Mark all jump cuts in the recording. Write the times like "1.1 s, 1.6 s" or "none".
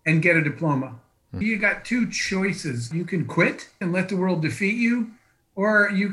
1.3 s, 2.9 s, 3.8 s